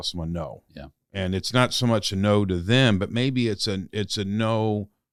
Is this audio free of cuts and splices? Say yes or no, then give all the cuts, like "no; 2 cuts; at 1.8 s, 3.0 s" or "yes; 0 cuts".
yes; 0 cuts